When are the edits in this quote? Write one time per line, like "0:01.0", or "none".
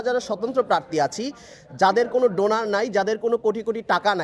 none